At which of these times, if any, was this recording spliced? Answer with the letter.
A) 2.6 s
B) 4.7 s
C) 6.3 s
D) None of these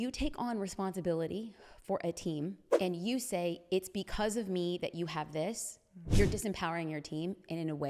A